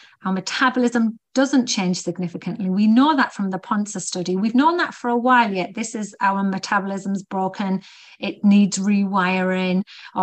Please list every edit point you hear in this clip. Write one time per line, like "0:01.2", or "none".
none